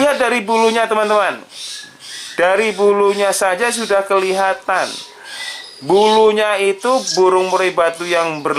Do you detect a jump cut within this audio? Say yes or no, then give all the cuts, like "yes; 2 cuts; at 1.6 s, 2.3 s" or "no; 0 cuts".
no; 0 cuts